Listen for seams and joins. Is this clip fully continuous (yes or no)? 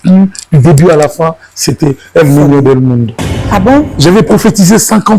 no